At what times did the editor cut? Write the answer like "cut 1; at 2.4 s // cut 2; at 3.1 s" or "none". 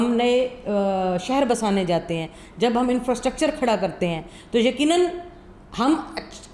none